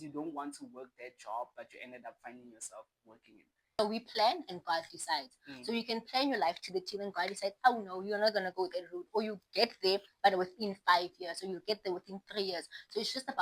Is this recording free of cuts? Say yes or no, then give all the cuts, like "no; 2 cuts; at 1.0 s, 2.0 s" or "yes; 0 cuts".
no; 1 cut; at 3.8 s